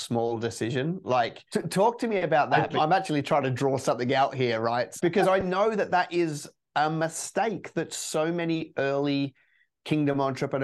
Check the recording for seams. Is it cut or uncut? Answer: cut